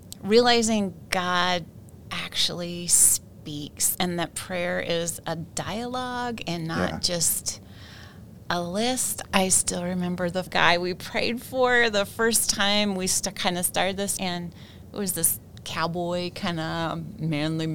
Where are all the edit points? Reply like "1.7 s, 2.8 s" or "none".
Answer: 9.1 s, 14.1 s